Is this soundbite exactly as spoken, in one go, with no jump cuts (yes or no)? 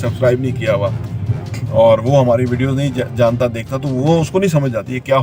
yes